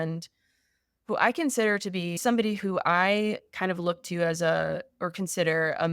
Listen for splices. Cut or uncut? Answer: cut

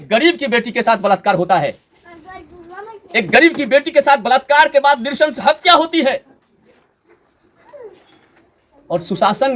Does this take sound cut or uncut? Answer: uncut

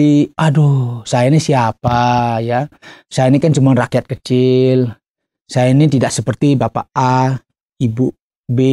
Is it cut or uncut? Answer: uncut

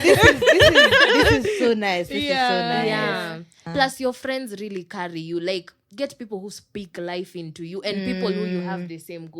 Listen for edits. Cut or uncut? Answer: cut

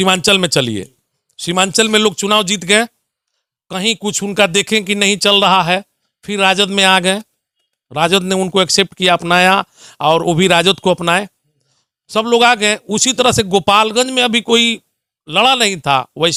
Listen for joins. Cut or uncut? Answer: uncut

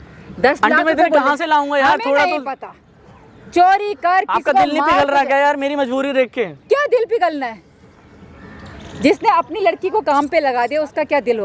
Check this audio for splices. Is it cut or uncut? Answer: uncut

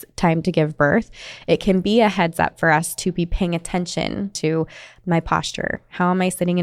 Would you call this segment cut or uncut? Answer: cut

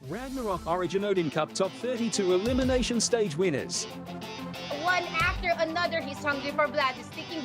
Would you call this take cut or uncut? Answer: cut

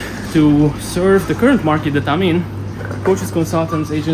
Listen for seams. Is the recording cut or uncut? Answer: uncut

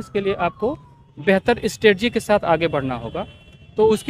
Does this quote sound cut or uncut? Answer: uncut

